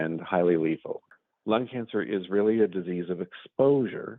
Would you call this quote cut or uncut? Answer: cut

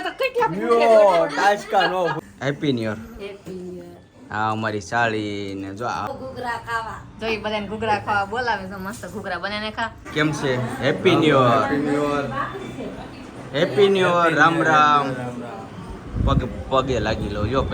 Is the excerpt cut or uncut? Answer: cut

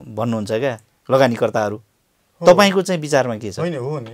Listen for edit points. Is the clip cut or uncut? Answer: uncut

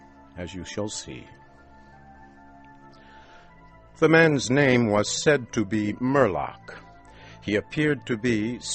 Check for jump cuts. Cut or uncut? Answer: cut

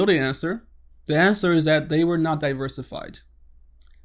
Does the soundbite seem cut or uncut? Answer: uncut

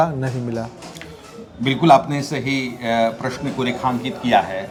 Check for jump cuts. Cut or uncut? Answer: uncut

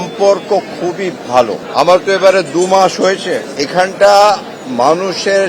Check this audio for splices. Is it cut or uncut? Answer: cut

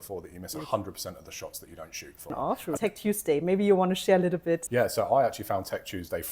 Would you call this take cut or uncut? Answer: cut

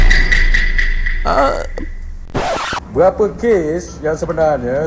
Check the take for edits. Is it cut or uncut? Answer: cut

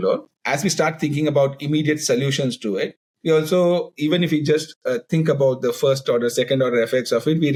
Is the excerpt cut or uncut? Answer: uncut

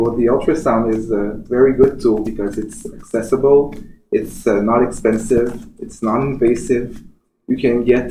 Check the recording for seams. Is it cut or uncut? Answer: uncut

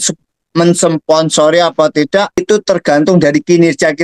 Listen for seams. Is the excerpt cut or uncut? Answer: cut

